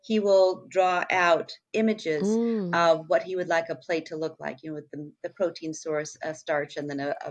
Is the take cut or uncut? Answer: uncut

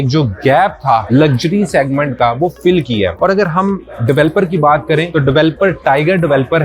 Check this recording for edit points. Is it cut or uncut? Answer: uncut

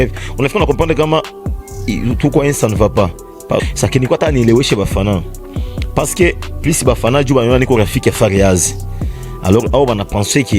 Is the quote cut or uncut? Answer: cut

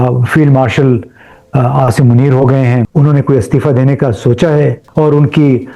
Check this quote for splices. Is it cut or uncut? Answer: cut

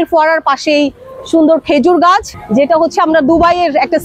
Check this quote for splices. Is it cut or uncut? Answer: cut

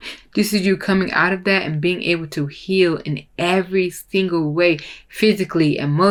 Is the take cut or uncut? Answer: uncut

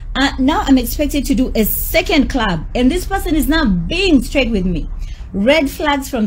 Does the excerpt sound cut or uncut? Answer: uncut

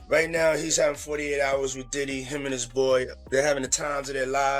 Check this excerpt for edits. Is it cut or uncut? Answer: cut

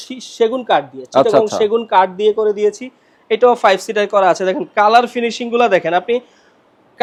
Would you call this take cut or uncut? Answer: uncut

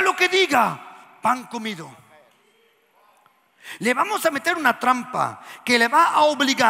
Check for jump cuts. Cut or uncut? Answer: uncut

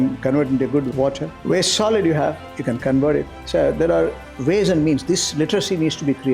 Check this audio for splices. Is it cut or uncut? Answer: cut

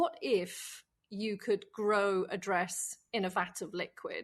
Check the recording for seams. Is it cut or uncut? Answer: uncut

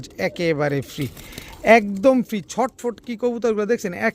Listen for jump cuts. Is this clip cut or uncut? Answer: uncut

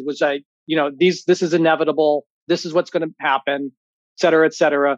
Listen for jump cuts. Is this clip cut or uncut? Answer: cut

